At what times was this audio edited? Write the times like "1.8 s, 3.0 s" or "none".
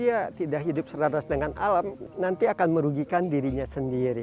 none